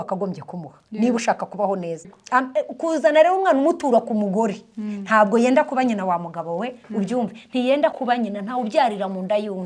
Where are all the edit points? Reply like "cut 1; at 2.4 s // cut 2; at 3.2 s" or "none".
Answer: cut 1; at 2.1 s